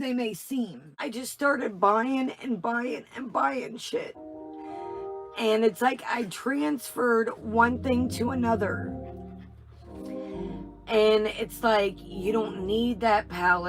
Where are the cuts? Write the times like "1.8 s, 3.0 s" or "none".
0.9 s